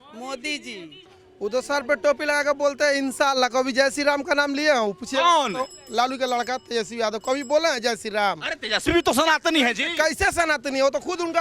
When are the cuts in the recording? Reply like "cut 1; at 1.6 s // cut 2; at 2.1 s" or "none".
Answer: cut 1; at 1.1 s